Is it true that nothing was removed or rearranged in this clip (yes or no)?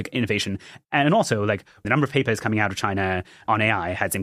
no